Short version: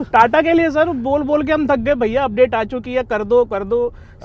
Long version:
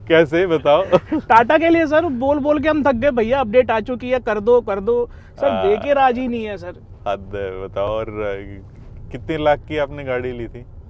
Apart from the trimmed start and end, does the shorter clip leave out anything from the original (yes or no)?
no